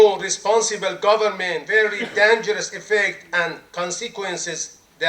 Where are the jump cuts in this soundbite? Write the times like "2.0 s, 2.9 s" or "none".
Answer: 1.6 s